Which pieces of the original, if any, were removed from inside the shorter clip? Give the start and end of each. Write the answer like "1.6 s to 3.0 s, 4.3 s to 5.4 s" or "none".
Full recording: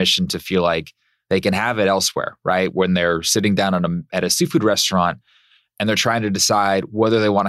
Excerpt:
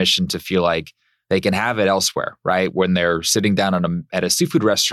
none